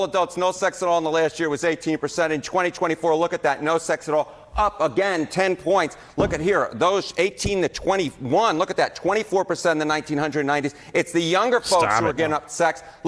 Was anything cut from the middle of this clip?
no; 0 cuts

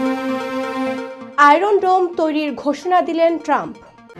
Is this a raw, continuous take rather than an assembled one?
yes; 0 cuts

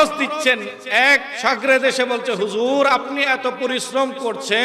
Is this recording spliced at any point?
yes; 1 cut; at 1.3 s

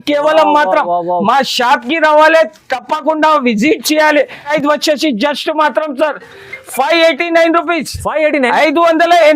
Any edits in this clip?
yes; 1 cut; at 4.5 s

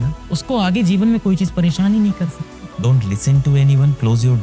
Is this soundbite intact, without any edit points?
no; 1 cut; at 2.6 s

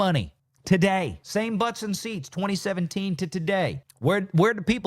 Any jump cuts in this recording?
yes; 2 cuts; at 1.2 s, 3.8 s

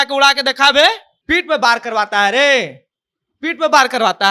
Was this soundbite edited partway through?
yes; 1 cut; at 1.1 s

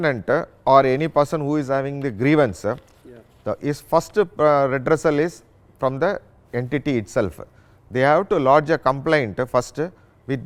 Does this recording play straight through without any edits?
yes; 0 cuts

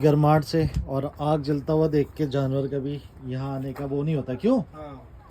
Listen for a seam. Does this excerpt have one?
no; 0 cuts

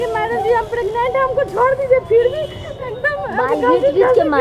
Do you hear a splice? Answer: no; 0 cuts

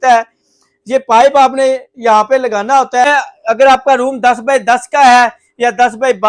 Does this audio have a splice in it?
yes; 1 cut; at 3.1 s

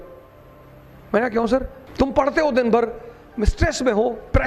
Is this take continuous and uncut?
no; 1 cut; at 1.8 s

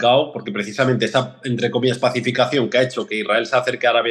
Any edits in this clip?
no; 0 cuts

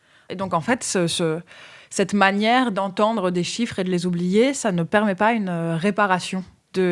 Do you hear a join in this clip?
no; 0 cuts

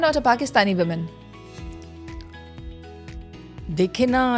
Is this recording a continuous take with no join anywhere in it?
yes; 0 cuts

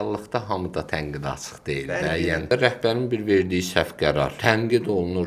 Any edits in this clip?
yes; 2 cuts; at 2.5 s, 4.4 s

